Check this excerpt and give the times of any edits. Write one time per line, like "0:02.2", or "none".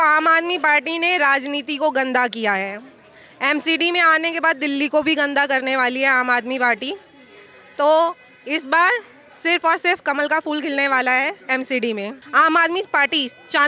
0:12.2